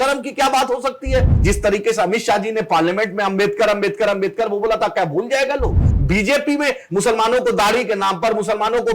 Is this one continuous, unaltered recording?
no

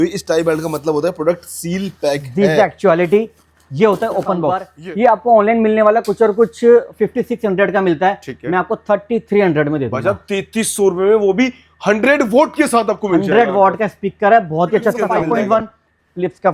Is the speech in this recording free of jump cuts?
no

